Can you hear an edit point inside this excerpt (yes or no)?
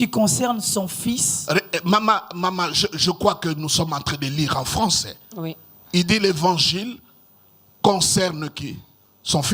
no